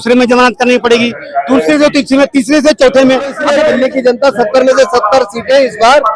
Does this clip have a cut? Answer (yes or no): yes